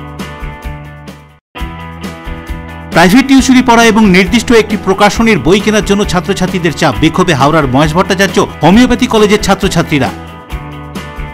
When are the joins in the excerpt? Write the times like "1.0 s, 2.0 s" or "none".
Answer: 1.4 s